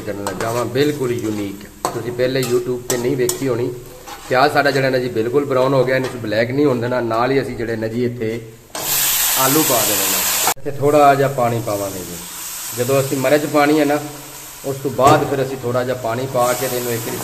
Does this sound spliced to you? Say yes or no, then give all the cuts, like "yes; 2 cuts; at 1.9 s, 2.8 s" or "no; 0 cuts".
yes; 1 cut; at 10.5 s